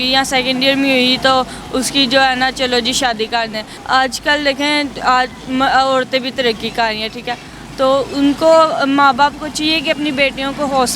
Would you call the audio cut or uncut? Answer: cut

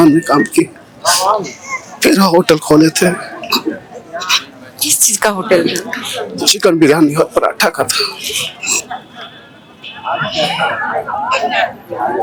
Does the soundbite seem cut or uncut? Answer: uncut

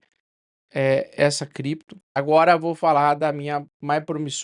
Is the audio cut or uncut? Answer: cut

